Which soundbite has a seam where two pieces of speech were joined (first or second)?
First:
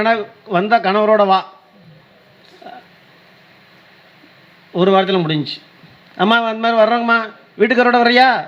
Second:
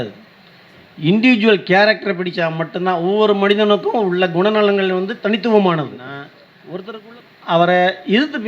second